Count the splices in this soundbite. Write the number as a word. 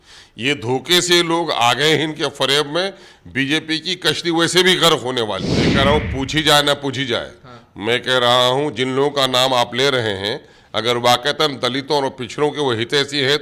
one